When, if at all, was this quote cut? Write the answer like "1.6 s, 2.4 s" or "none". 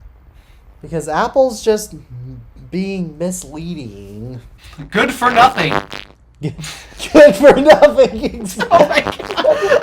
4.6 s